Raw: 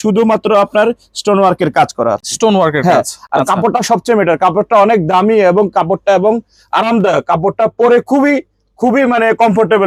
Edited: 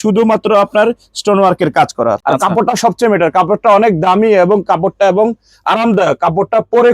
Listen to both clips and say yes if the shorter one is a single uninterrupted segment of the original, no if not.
no